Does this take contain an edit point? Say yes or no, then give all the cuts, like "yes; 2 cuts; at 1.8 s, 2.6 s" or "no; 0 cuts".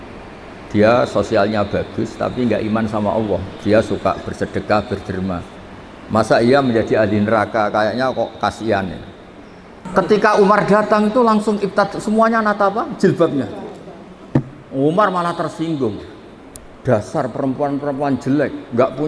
yes; 1 cut; at 9.8 s